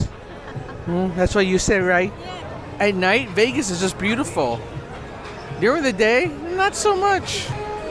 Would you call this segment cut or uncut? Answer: uncut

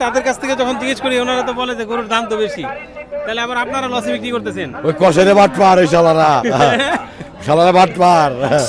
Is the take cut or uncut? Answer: uncut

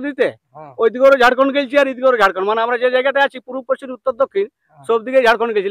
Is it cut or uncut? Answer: uncut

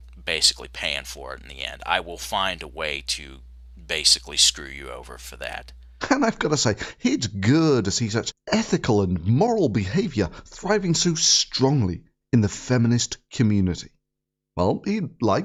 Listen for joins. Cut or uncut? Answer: uncut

